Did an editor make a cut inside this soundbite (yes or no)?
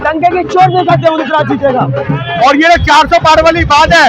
yes